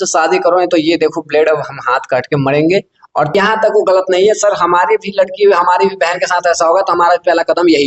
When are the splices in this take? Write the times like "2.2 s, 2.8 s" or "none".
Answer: 3.3 s